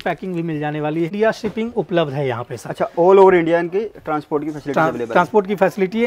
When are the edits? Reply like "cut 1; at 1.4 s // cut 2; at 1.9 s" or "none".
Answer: cut 1; at 1.1 s